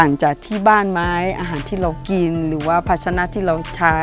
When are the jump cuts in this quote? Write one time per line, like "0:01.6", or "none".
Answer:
none

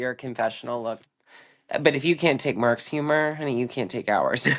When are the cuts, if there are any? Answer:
0:01.1

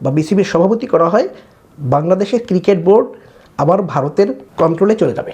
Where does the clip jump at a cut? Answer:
0:04.4

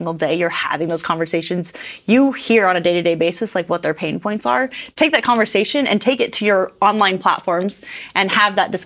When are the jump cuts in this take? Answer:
0:04.8

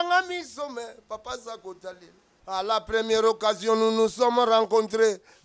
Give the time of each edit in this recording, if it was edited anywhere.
0:02.3

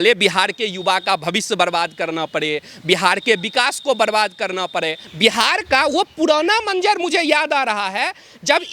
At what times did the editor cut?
0:05.0

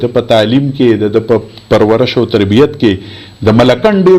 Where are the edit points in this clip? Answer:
none

